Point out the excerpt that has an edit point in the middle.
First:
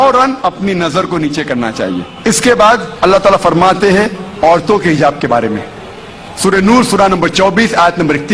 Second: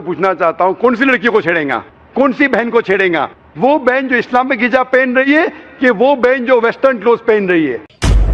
first; 2 cuts; at 2.1 s, 2.9 s

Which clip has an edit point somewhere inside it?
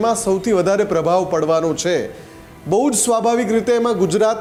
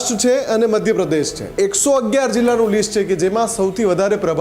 second; 1 cut; at 1.6 s

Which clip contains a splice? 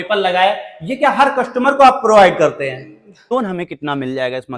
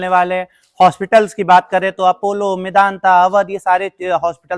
first; 1 cut; at 3.3 s

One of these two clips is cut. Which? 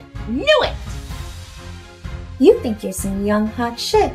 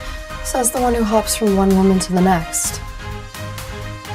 first; 2 cuts; at 0.7 s, 2.3 s

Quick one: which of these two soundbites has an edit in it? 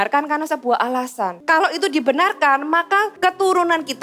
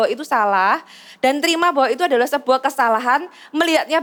first; 2 cuts; at 1.4 s, 3.1 s

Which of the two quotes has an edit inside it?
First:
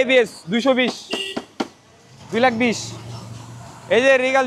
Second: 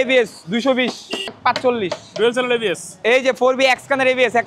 second; 2 cuts; at 1.3 s, 2.9 s

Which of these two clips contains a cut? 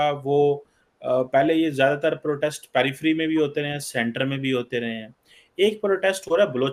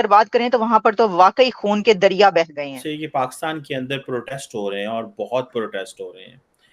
second; 1 cut; at 3.0 s

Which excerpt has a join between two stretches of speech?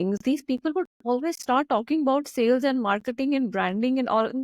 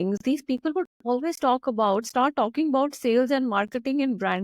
first; 1 cut; at 1.4 s

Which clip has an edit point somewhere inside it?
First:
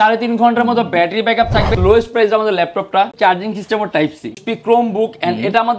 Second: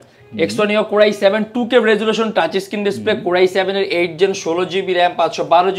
first; 3 cuts; at 1.8 s, 3.1 s, 4.4 s

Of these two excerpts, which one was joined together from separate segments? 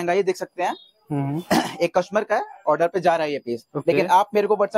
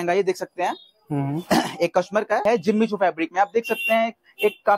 second; 1 cut; at 2.4 s

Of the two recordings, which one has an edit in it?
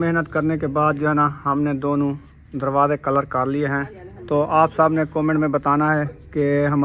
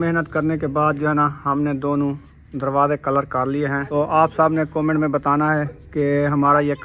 second; 1 cut; at 3.8 s

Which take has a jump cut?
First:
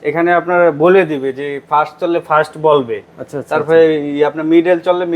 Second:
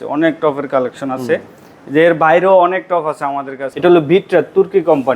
second; 1 cut; at 3.6 s

